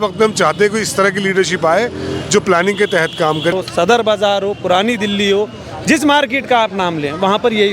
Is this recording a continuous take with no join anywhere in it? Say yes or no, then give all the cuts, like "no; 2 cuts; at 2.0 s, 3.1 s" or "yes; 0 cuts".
no; 1 cut; at 3.5 s